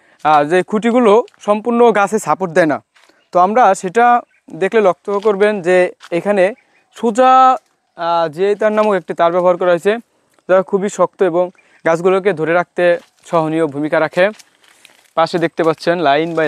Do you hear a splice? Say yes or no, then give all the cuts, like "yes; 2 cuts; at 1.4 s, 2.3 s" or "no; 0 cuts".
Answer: no; 0 cuts